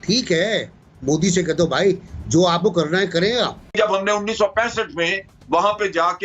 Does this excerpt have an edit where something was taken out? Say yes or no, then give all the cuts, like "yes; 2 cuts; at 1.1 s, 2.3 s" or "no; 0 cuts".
yes; 1 cut; at 3.7 s